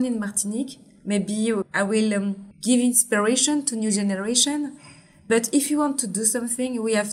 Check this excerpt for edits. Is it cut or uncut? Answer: uncut